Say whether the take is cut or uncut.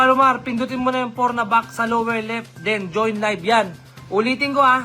uncut